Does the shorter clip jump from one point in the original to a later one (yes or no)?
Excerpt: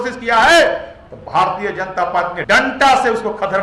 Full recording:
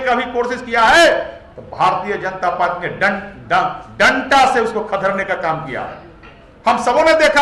yes